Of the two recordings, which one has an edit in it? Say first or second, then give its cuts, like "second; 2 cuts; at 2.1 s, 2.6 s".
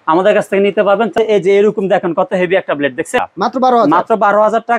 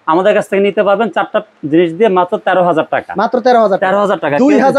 first; 2 cuts; at 1.1 s, 3.2 s